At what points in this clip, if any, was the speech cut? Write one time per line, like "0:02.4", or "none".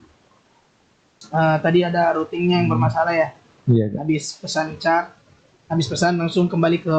0:01.2